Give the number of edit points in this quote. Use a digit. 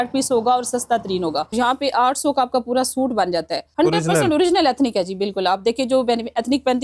2